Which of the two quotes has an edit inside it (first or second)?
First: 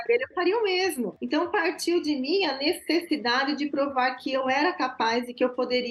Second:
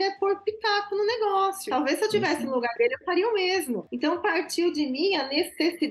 second